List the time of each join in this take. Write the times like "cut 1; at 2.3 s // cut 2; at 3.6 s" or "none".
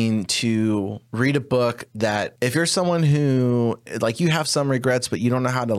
cut 1; at 1.0 s // cut 2; at 2.3 s // cut 3; at 3.9 s